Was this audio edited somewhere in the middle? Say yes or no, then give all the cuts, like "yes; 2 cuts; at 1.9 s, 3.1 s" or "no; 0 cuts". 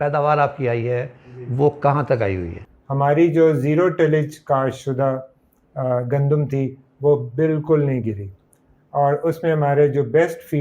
yes; 1 cut; at 2.5 s